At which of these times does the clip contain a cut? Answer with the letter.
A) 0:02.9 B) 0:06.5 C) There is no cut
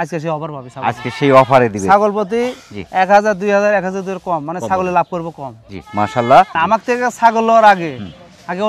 B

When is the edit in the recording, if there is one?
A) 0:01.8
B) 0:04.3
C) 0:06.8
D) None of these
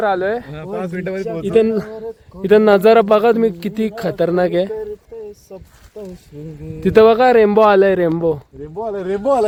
D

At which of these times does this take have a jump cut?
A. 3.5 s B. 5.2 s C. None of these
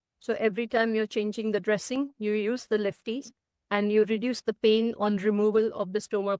C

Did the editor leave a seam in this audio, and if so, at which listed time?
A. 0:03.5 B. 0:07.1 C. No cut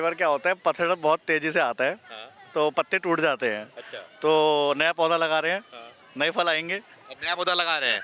C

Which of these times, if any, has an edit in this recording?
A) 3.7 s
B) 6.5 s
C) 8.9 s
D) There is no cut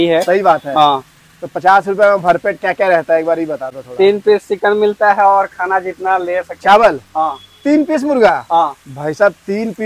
D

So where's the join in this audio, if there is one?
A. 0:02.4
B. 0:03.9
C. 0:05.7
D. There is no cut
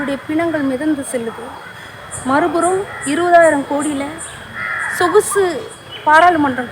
D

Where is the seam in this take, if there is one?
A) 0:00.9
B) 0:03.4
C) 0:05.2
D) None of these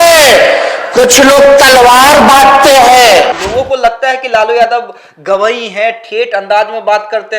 B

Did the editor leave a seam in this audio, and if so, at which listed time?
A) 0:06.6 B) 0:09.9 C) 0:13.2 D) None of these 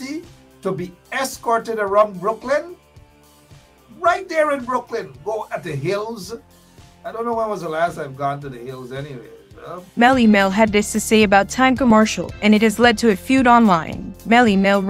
B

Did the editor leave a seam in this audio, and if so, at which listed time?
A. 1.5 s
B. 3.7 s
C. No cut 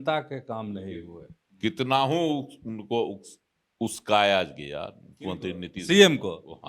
C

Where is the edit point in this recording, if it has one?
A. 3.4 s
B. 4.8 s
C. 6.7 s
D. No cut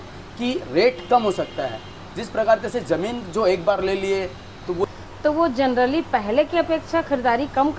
B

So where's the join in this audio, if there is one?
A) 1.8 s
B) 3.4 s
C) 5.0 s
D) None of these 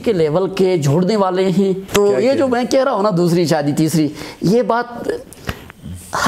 A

